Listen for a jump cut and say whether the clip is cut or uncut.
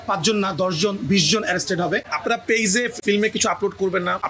cut